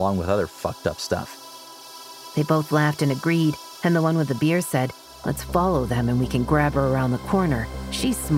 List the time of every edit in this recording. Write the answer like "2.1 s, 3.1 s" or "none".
1.8 s